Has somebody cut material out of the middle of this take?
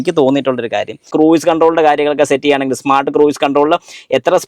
yes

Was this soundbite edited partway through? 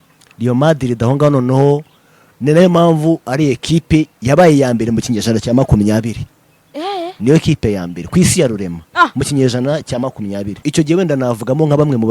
yes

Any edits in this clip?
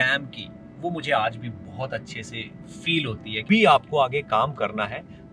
yes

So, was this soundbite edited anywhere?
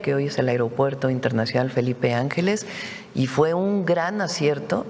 no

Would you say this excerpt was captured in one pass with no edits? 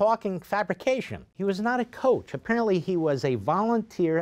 no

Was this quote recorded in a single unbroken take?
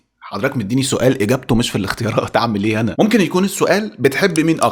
yes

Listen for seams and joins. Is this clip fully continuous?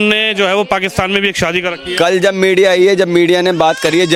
yes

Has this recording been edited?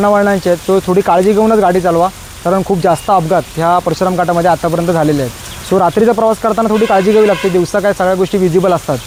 no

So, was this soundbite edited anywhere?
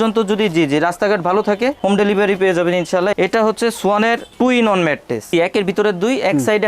yes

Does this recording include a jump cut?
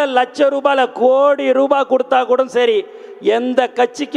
no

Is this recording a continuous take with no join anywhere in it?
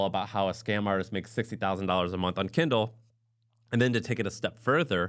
yes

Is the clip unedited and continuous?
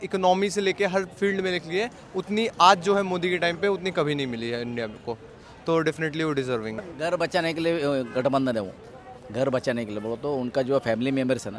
no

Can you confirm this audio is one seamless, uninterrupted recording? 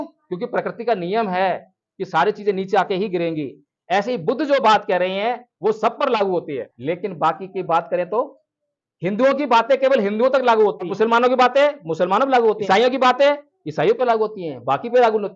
no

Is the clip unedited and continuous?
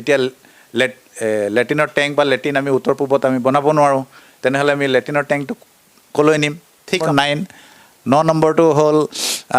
no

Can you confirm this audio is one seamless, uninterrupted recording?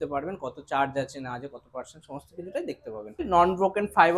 no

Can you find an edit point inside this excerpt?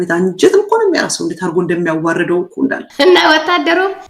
yes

